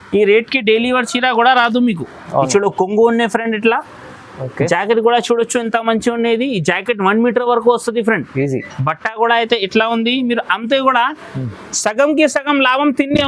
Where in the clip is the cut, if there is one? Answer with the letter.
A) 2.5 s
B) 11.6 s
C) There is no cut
A